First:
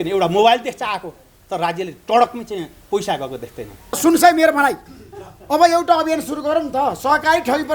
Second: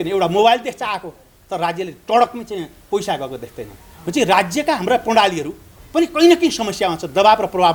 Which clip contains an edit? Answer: first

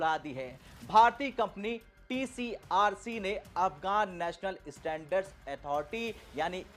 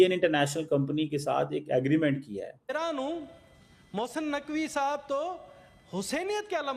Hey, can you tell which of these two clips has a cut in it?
second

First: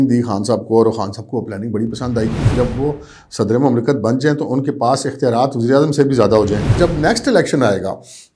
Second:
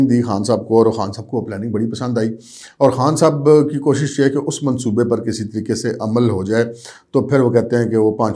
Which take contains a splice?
first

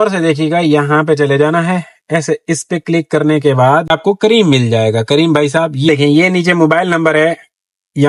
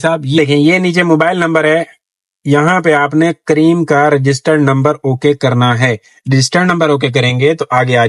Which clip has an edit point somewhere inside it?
first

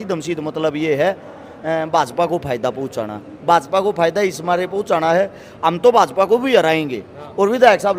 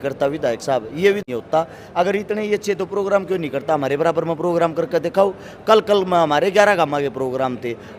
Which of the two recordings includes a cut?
second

